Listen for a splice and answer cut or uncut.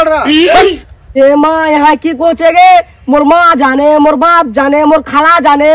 cut